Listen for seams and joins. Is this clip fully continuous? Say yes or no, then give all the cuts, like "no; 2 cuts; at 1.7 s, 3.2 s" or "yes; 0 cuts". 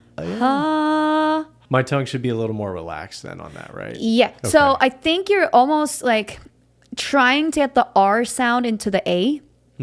no; 1 cut; at 1.6 s